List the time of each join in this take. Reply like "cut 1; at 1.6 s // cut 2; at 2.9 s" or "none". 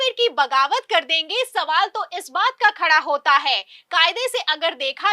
none